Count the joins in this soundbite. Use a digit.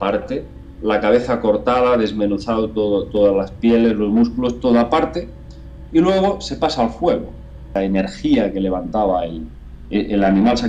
1